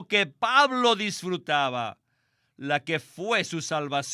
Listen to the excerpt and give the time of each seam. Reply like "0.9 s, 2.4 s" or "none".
none